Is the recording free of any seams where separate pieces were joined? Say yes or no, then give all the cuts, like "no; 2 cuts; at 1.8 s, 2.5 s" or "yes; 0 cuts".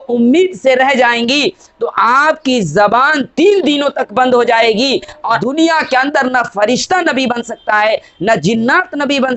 no; 1 cut; at 5.4 s